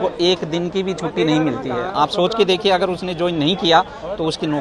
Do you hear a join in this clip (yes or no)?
no